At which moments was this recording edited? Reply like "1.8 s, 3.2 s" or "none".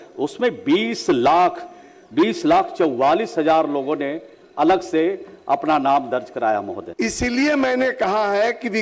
6.8 s